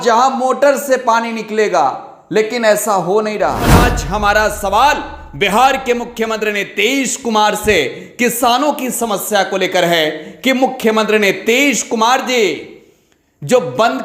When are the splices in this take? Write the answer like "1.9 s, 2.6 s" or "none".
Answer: 3.8 s